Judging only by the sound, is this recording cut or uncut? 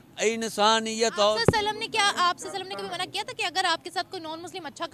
uncut